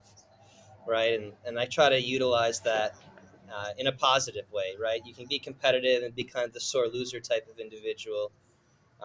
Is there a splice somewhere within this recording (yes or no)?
no